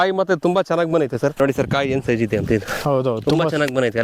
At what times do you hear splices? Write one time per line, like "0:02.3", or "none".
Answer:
0:01.4